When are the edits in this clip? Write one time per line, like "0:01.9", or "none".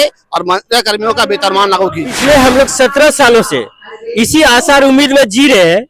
0:02.2